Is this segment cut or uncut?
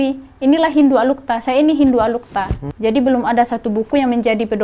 cut